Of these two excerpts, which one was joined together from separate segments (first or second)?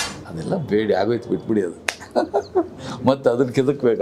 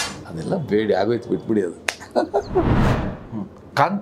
second